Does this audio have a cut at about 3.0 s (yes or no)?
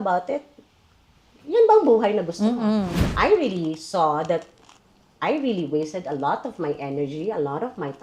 yes